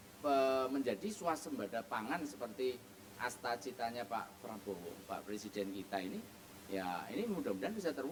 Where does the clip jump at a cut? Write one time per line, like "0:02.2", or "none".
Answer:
none